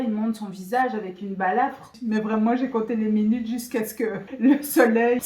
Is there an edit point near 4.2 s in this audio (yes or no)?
yes